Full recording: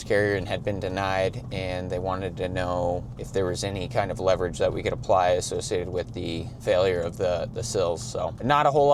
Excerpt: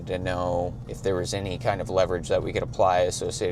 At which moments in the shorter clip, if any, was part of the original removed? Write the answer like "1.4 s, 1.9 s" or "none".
none